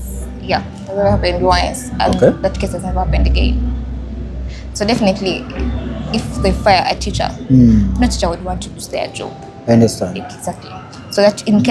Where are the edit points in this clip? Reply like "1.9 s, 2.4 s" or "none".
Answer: none